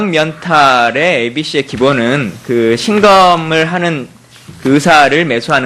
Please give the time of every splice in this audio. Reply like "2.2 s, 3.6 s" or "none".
none